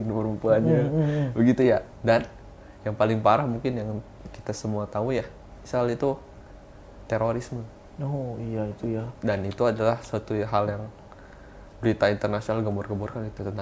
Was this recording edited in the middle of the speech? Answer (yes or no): no